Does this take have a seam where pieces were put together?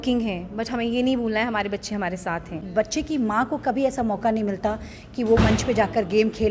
yes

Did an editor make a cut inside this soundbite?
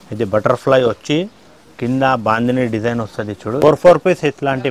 yes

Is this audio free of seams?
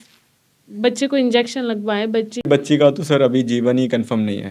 no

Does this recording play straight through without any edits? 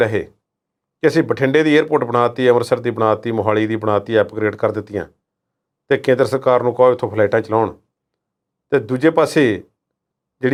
yes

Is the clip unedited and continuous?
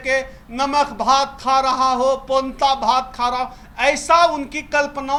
yes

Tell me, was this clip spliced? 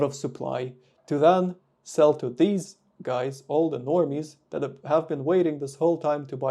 no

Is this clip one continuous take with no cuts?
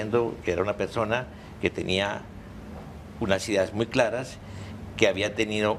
no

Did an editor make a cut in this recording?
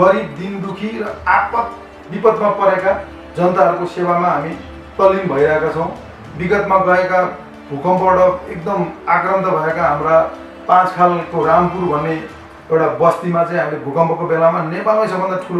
no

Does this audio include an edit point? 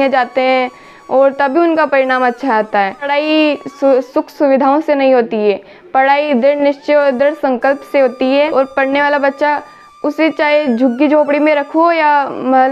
yes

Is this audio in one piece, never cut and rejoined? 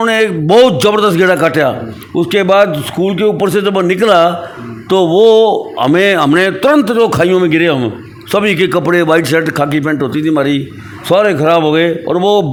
yes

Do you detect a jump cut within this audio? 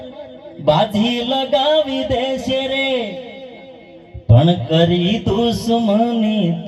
no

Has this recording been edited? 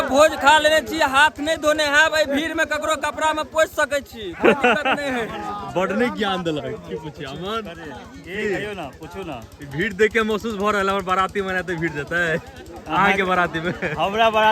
no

